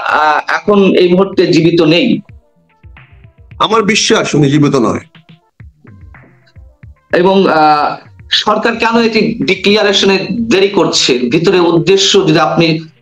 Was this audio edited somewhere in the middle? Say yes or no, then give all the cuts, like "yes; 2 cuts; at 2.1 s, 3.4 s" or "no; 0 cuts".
no; 0 cuts